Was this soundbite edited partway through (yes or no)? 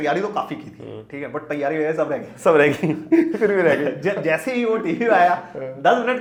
no